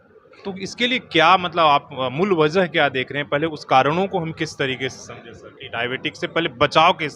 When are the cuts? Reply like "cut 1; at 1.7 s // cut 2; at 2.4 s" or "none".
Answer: none